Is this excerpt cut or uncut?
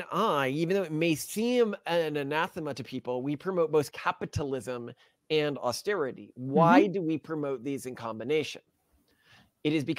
uncut